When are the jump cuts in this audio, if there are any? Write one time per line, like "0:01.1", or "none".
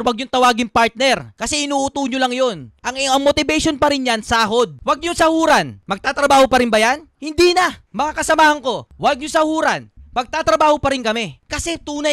0:04.8
0:08.9